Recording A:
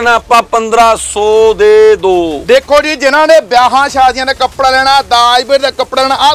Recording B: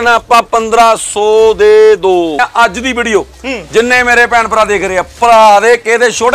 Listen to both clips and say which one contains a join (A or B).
B